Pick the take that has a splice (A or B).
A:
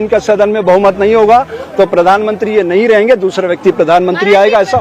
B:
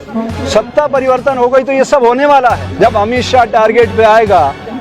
B